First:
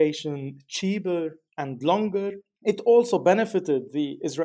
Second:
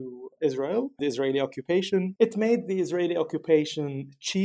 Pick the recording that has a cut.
first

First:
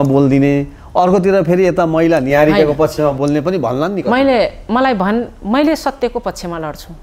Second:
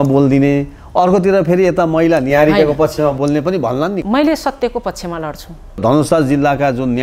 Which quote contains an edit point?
second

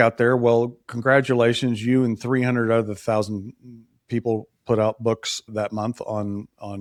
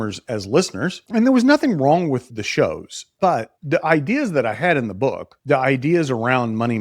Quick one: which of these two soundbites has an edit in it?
second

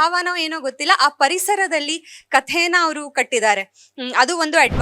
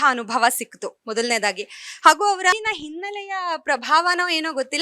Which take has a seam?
second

